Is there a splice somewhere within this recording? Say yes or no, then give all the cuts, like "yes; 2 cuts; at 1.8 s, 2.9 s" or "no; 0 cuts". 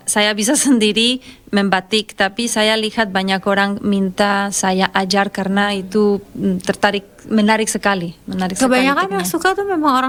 no; 0 cuts